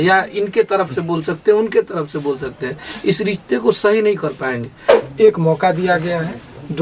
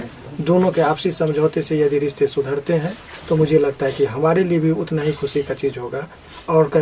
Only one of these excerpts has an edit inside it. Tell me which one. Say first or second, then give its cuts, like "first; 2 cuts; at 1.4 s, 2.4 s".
first; 1 cut; at 4.9 s